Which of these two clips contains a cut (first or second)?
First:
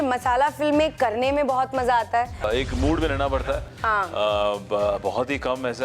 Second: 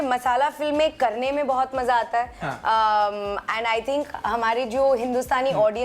first